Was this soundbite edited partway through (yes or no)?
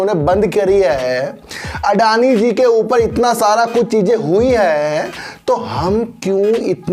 no